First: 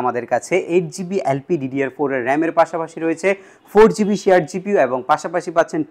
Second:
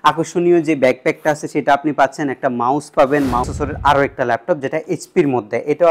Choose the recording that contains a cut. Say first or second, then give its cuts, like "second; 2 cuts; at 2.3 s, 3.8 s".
second; 1 cut; at 3.5 s